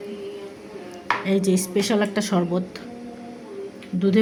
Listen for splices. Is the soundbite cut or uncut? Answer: uncut